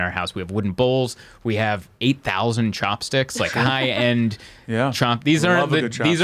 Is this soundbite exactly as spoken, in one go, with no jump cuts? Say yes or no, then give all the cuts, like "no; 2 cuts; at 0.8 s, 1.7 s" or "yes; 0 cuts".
yes; 0 cuts